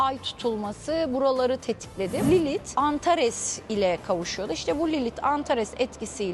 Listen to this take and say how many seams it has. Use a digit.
1